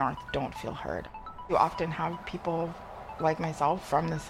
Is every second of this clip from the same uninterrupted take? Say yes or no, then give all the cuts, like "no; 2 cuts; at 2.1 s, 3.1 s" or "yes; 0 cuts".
no; 1 cut; at 1.4 s